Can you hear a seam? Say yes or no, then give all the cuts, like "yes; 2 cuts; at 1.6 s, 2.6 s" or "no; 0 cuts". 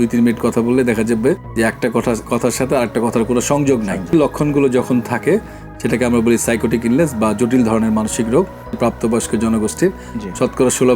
yes; 2 cuts; at 4.1 s, 8.8 s